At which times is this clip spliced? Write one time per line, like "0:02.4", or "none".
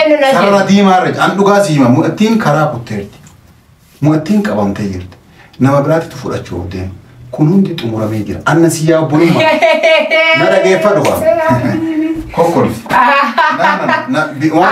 none